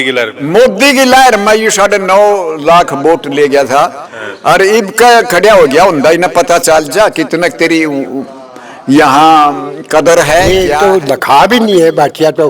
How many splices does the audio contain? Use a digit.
1